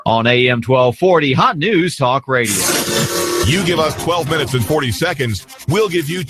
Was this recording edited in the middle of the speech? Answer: yes; 1 cut; at 2.6 s

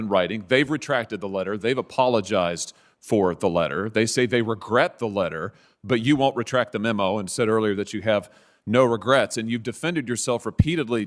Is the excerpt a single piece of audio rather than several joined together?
yes; 0 cuts

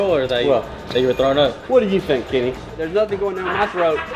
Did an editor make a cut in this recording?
yes; 1 cut; at 2.8 s

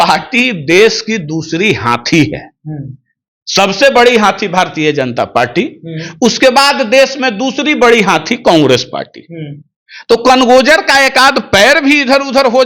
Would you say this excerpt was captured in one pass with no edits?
yes; 0 cuts

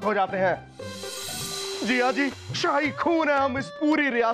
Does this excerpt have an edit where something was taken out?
yes; 1 cut; at 1.4 s

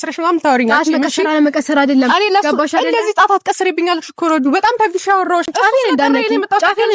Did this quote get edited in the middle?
yes; 1 cut; at 5.5 s

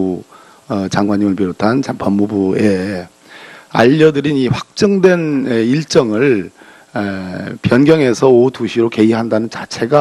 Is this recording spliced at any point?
no; 0 cuts

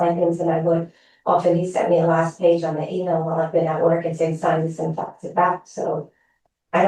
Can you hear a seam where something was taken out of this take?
no; 0 cuts

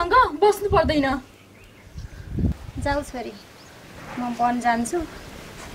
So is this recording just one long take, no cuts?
yes; 0 cuts

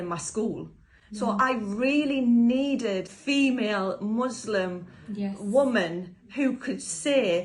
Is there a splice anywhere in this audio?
yes; 1 cut; at 3.1 s

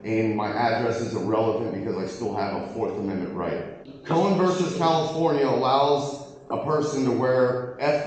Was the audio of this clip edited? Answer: yes; 1 cut; at 3.9 s

